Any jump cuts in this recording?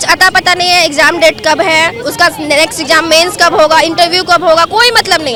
no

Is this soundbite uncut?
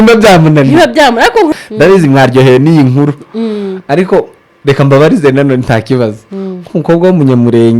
no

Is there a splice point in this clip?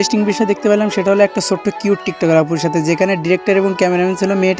no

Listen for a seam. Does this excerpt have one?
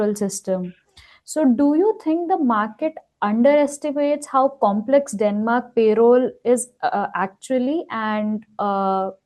no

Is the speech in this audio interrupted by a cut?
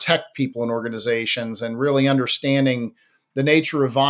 no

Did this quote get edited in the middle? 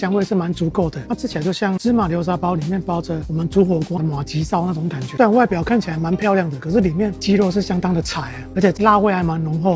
yes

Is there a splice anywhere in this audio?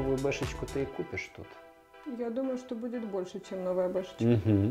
no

